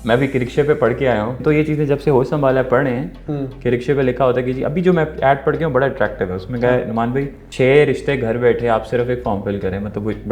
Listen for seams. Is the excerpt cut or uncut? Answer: cut